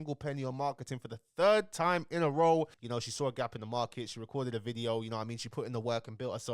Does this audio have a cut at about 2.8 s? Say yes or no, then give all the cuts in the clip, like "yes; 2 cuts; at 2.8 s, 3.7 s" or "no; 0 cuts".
yes; 1 cut; at 2.8 s